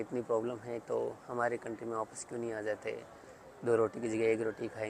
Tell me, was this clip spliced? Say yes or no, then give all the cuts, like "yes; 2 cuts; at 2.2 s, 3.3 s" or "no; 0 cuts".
no; 0 cuts